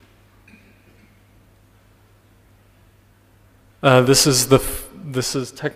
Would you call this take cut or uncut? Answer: cut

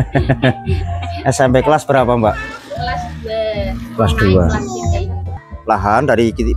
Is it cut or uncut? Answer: cut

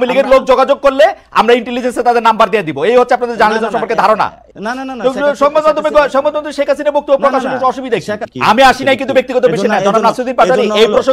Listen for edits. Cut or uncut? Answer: cut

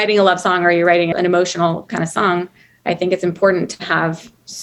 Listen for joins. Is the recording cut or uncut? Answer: cut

